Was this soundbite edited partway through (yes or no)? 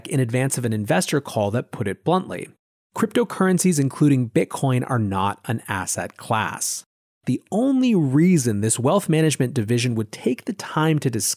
yes